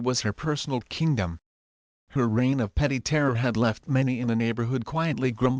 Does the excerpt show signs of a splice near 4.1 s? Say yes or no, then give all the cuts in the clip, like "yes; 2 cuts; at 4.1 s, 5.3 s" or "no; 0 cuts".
no; 1 cut; at 1.5 s